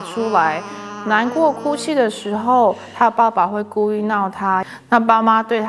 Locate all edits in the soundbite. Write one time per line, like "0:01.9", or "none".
0:04.7